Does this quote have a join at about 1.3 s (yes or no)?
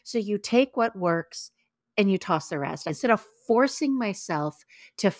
no